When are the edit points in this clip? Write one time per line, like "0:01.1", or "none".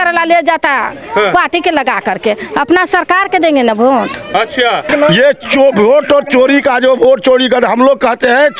0:04.9